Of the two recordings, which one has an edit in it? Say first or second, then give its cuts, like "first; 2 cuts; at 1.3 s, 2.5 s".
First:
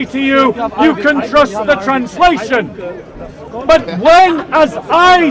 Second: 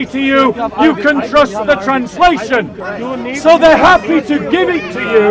second; 1 cut; at 2.8 s